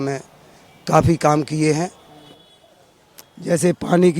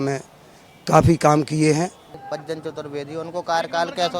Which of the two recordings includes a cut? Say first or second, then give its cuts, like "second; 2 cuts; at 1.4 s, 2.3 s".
second; 1 cut; at 2.2 s